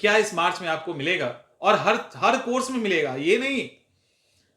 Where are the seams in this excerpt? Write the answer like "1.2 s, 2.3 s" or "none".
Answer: none